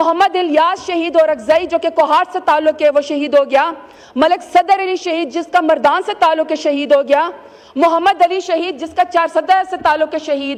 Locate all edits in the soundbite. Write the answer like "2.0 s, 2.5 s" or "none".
none